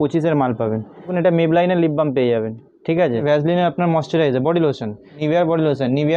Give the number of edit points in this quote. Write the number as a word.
three